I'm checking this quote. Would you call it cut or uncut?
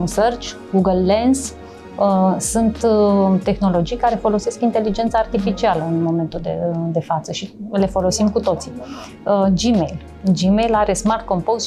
uncut